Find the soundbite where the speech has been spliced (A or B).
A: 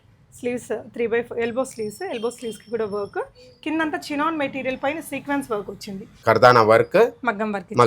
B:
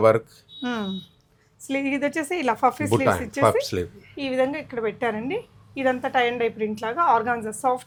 A